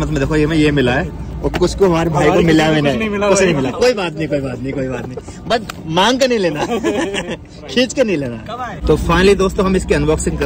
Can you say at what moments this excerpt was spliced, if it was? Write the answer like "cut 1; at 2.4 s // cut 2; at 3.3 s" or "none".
none